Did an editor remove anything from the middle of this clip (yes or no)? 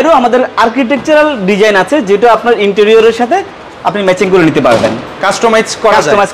no